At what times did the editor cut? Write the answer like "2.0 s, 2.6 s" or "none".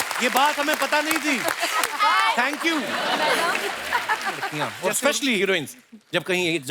4.6 s